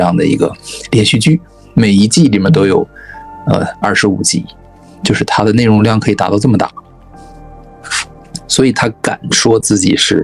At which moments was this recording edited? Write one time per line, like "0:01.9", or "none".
none